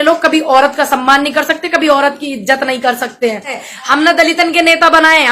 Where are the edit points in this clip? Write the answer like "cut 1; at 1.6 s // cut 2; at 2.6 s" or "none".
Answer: cut 1; at 3.7 s

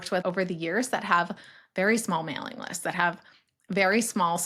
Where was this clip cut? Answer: none

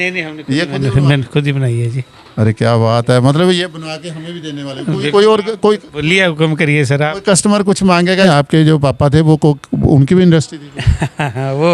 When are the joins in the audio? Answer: cut 1; at 8.3 s

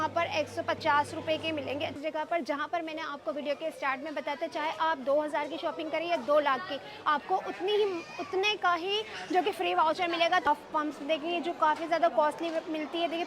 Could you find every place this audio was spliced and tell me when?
cut 1; at 1.9 s // cut 2; at 10.5 s

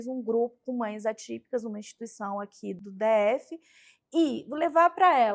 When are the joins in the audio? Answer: cut 1; at 2.8 s

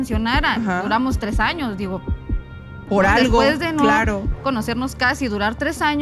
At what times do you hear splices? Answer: none

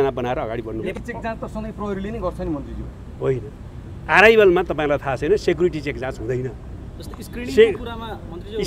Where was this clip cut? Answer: cut 1; at 0.9 s

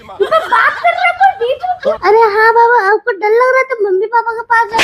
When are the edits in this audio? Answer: cut 1; at 1.9 s

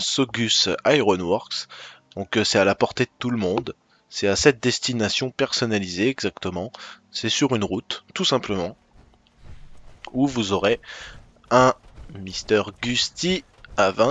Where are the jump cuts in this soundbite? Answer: cut 1; at 3.4 s

